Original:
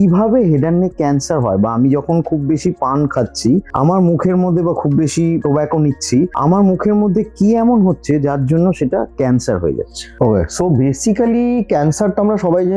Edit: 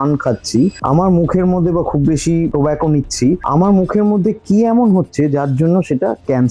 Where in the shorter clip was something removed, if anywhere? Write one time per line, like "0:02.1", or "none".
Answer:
none